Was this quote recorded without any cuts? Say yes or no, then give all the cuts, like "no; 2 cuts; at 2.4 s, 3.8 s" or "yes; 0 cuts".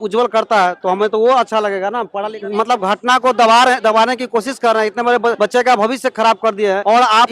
yes; 0 cuts